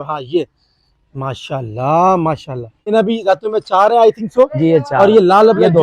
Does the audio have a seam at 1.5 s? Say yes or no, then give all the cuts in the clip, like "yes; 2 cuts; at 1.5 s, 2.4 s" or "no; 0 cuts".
no; 1 cut; at 2.9 s